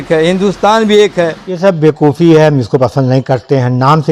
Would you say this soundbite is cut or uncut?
cut